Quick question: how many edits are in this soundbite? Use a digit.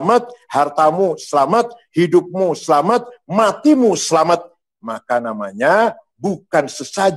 0